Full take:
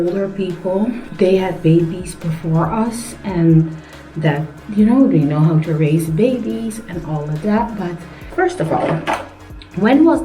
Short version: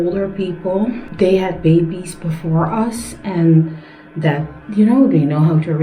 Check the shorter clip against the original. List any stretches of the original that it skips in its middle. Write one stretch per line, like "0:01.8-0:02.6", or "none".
none